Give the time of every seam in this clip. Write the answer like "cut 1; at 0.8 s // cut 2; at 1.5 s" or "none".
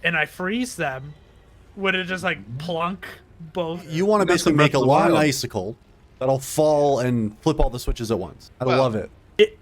cut 1; at 3.9 s // cut 2; at 8.4 s